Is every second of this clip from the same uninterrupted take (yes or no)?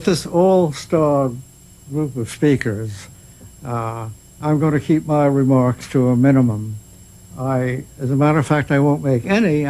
no